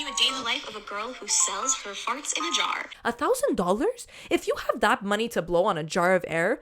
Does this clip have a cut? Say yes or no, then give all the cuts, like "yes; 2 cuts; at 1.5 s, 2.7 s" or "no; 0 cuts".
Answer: yes; 1 cut; at 3.0 s